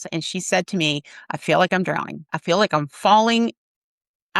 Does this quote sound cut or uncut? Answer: cut